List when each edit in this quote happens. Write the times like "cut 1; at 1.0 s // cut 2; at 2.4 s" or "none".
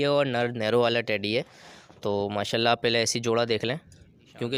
none